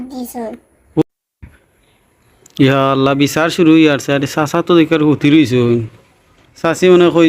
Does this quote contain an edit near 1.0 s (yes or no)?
yes